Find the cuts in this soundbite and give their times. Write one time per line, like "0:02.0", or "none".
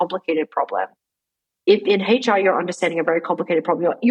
none